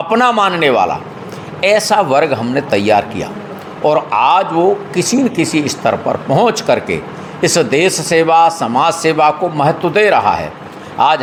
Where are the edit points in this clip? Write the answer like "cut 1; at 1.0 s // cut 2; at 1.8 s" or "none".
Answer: none